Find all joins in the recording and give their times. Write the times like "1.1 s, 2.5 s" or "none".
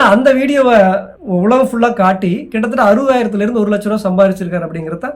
1.1 s